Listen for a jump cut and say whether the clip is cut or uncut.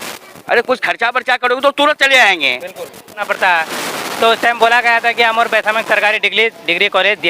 cut